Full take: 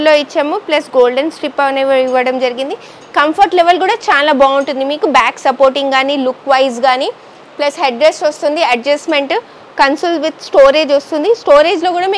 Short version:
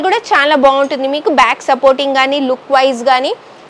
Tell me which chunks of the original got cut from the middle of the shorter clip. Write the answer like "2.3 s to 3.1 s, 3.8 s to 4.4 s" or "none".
none